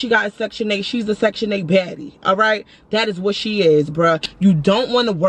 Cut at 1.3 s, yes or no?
no